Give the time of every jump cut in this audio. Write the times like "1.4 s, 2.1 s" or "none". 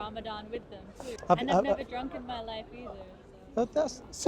1.1 s